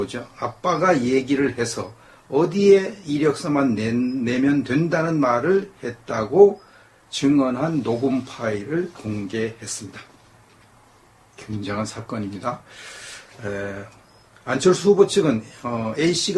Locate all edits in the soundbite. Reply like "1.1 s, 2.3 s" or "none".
8.6 s